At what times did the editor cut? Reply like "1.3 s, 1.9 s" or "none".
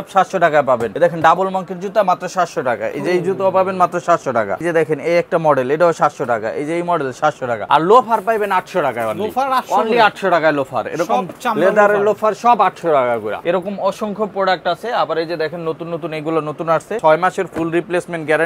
0.9 s, 4.6 s, 7.6 s, 13.3 s, 17.0 s